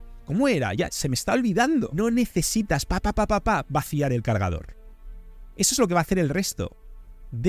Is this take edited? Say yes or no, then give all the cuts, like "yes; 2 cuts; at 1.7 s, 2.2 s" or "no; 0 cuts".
yes; 1 cut; at 1.9 s